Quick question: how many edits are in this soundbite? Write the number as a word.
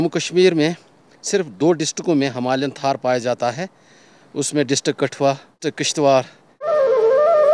one